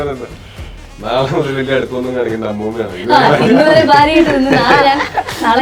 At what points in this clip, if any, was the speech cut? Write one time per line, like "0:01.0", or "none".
none